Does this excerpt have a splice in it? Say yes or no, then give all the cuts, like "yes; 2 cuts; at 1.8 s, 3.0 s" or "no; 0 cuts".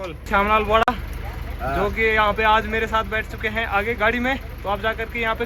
no; 0 cuts